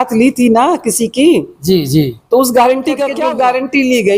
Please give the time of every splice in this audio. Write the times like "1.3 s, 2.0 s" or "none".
3.1 s